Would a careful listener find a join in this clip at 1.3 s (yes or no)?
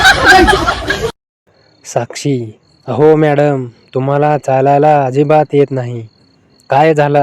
yes